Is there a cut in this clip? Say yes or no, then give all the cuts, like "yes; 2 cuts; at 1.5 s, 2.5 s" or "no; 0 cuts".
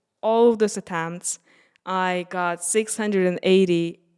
no; 0 cuts